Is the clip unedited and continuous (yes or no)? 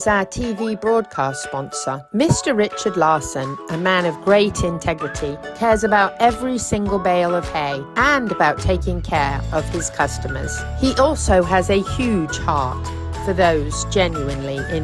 yes